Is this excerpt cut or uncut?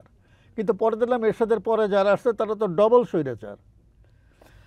uncut